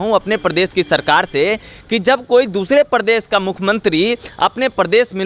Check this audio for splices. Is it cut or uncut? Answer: uncut